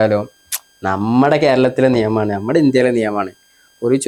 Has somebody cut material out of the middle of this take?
no; 0 cuts

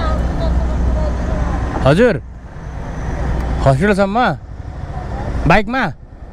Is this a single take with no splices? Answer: yes; 0 cuts

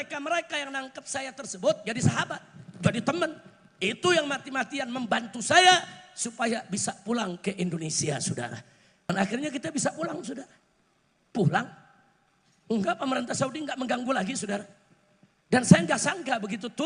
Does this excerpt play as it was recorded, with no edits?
no; 1 cut; at 9.1 s

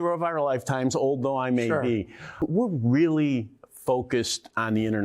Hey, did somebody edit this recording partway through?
yes; 1 cut; at 2.4 s

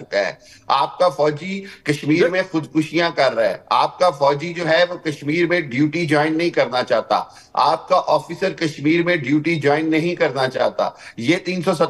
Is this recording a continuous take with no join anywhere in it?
yes; 0 cuts

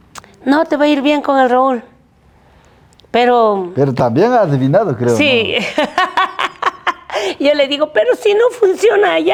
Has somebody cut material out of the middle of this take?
no; 0 cuts

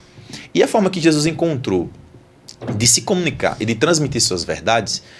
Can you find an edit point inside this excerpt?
no; 0 cuts

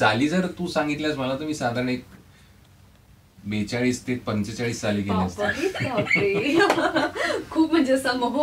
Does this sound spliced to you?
no; 0 cuts

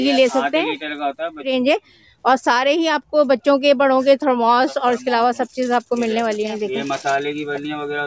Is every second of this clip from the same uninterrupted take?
no; 2 cuts; at 1.5 s, 6.5 s

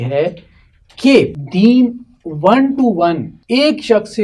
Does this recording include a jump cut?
yes; 2 cuts; at 1.4 s, 3.3 s

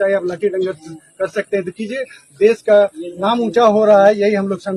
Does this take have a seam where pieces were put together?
no; 0 cuts

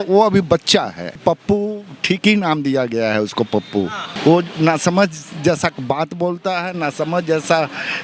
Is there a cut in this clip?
yes; 2 cuts; at 1.2 s, 4.0 s

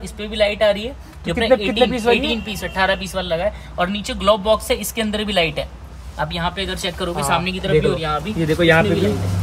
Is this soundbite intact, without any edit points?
yes; 0 cuts

